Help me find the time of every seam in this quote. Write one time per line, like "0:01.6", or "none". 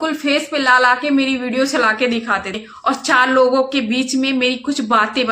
0:02.7